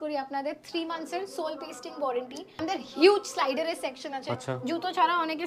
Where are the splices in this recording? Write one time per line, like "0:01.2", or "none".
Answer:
0:02.6